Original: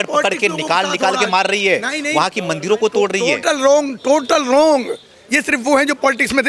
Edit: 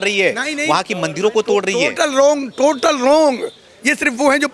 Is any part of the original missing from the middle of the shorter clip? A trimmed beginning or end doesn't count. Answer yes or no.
no